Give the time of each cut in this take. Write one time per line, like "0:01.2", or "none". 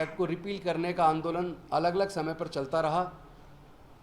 none